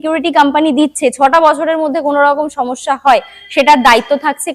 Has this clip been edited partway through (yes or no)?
no